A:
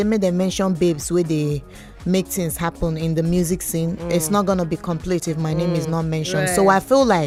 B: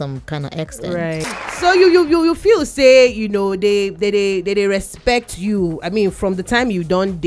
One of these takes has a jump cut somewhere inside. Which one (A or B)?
B